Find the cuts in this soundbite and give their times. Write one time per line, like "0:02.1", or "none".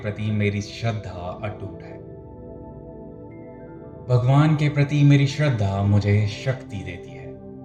none